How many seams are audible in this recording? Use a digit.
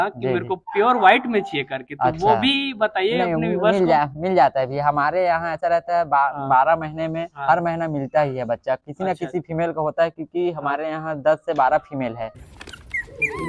1